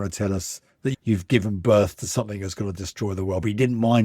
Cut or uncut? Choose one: cut